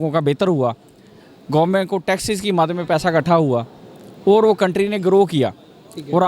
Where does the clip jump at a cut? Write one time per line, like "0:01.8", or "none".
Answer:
none